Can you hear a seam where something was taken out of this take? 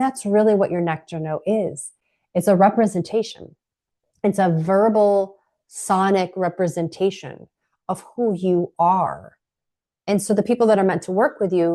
no; 0 cuts

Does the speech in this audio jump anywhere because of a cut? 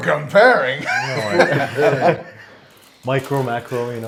no; 0 cuts

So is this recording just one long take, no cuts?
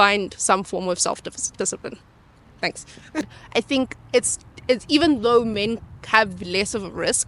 no; 1 cut; at 3.3 s

